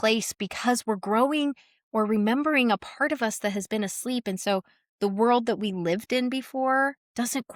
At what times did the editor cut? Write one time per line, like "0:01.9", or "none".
none